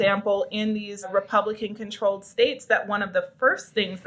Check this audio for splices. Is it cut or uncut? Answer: cut